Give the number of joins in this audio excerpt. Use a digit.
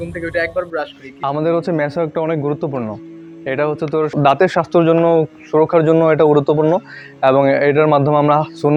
0